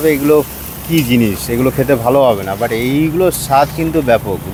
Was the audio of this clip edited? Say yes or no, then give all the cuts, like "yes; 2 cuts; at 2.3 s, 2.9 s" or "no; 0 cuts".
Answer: no; 0 cuts